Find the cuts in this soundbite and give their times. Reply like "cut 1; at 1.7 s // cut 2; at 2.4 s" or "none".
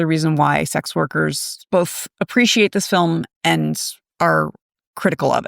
cut 1; at 1.5 s